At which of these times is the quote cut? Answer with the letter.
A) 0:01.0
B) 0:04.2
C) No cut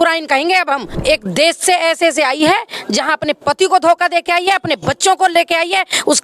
A